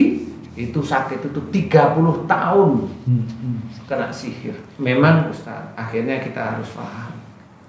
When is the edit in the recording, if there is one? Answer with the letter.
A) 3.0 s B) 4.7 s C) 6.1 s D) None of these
B